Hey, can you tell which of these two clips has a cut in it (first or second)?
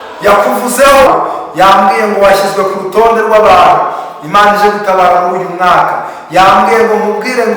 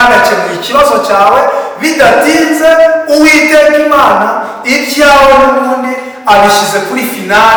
first